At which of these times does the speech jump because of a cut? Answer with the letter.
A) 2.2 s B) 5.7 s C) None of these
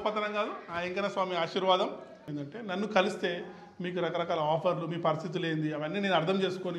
A